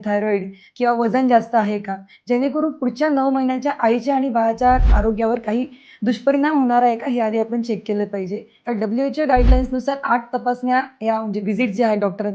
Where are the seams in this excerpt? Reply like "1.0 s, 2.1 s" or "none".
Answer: 4.9 s, 8.5 s